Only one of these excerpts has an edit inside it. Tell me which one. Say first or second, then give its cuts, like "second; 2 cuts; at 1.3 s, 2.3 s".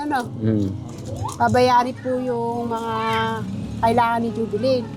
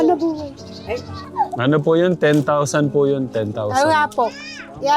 second; 1 cut; at 1.2 s